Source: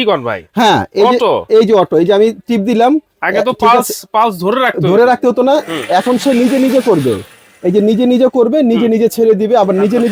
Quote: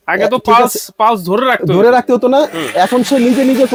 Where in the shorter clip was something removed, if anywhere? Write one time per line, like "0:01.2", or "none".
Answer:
none